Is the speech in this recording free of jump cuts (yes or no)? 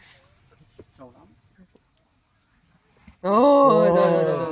yes